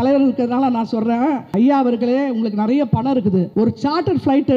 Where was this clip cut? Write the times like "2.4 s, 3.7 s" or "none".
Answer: 1.4 s, 3.5 s